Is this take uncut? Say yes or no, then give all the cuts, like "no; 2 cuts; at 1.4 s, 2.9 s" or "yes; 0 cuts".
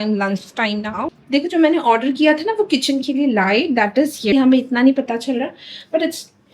no; 2 cuts; at 1.1 s, 4.3 s